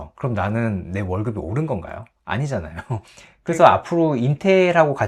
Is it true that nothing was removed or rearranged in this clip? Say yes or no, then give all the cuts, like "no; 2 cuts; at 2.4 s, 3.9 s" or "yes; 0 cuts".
no; 1 cut; at 3.3 s